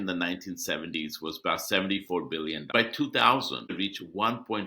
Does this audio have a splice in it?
yes; 2 cuts; at 2.7 s, 3.7 s

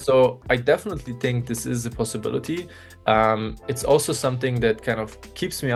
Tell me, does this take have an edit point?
no; 0 cuts

